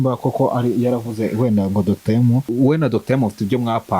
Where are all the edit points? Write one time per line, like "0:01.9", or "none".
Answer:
0:02.5